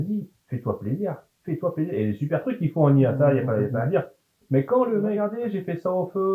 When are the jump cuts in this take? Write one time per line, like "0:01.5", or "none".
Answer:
0:05.2